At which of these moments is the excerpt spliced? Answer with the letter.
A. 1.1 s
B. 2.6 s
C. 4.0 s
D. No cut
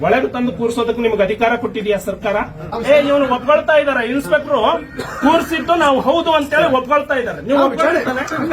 B